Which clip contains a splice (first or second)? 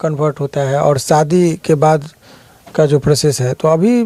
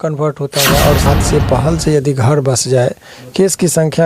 second